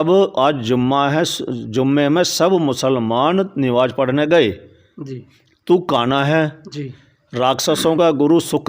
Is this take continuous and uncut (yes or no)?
yes